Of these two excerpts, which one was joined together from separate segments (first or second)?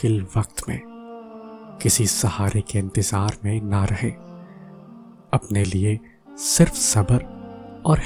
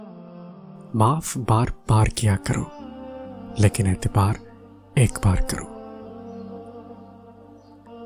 second